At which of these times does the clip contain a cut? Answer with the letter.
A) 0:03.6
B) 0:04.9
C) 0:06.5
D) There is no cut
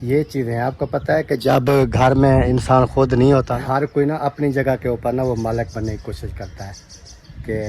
A